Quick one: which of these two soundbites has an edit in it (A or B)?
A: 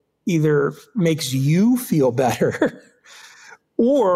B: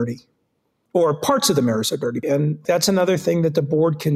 B